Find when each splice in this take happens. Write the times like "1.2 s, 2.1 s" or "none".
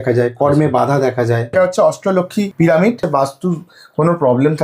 1.5 s, 2.5 s, 3.0 s